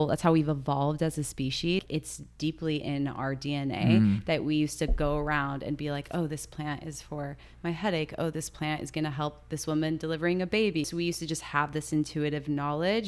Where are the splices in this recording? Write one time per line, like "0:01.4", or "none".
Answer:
0:01.8
0:10.9